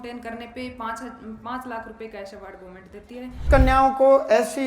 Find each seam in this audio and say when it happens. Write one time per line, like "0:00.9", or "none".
0:03.4